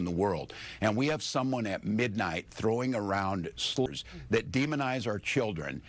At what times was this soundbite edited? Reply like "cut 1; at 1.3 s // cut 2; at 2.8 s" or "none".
cut 1; at 3.9 s

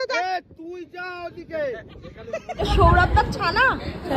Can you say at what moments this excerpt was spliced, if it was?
cut 1; at 2.8 s

